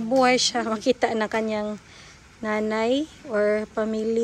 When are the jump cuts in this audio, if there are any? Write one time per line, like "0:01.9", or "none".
none